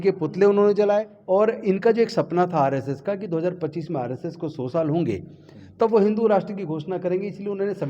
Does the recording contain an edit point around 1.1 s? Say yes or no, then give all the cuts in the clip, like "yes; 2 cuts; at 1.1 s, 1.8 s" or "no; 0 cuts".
yes; 1 cut; at 1.1 s